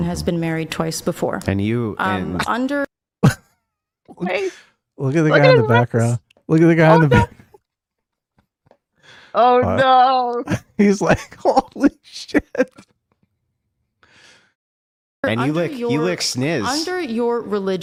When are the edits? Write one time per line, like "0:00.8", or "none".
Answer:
none